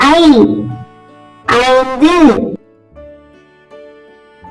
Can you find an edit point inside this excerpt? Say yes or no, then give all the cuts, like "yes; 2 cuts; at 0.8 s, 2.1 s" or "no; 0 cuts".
yes; 1 cut; at 2.6 s